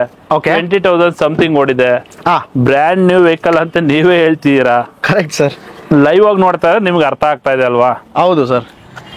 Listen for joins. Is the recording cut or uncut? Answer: uncut